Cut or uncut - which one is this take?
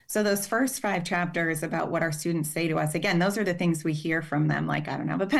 uncut